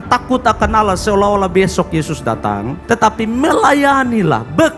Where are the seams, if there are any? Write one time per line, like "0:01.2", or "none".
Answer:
none